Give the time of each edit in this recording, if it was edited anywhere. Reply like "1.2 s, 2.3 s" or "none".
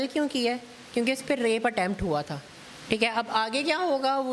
none